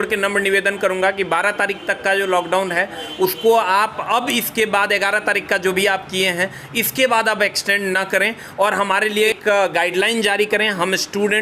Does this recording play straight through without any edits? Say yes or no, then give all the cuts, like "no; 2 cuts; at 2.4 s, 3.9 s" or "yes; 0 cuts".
no; 1 cut; at 9.4 s